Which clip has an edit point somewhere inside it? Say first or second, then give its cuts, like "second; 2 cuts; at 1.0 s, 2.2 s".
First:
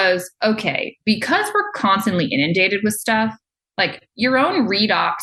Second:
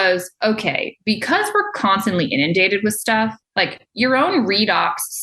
second; 1 cut; at 3.4 s